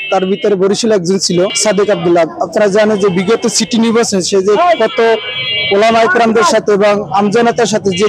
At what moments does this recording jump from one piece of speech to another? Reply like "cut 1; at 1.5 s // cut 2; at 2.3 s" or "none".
none